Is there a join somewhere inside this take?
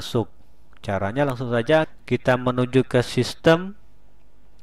yes; 1 cut; at 2.0 s

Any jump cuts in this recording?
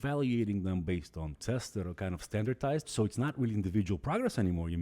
yes; 2 cuts; at 1.4 s, 2.9 s

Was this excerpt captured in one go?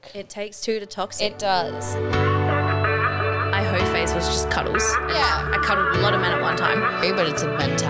no; 1 cut; at 1.9 s

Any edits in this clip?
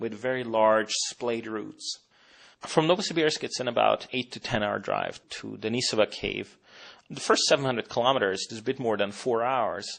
yes; 1 cut; at 8.9 s

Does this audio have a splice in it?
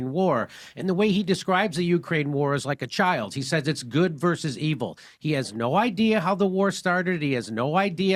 no; 0 cuts

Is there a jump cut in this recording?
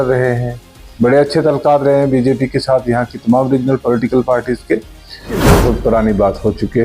yes; 1 cut; at 5.4 s

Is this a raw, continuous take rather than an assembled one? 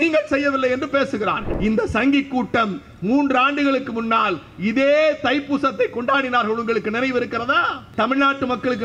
no; 2 cuts; at 1.5 s, 7.8 s

